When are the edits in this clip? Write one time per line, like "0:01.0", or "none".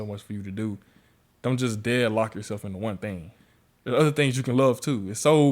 0:03.4